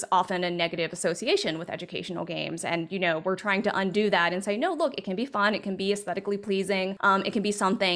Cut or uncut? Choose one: cut